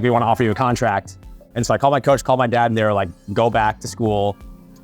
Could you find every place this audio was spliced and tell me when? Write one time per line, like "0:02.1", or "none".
0:01.5